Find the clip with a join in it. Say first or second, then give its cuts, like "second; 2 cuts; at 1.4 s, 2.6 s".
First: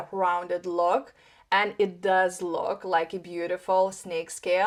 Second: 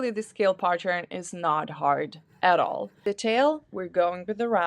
second; 1 cut; at 3.0 s